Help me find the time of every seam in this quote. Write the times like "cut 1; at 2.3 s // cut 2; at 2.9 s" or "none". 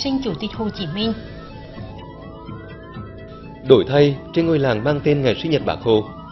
cut 1; at 1.6 s // cut 2; at 3.6 s